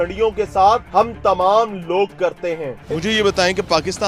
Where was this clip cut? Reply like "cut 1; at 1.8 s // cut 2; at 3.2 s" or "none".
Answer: cut 1; at 2.7 s